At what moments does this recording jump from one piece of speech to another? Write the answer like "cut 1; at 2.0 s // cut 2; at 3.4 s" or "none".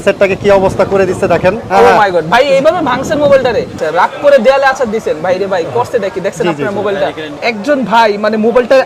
cut 1; at 1.6 s // cut 2; at 3.8 s // cut 3; at 7.3 s